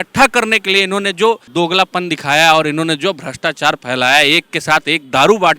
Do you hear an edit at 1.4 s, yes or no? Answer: yes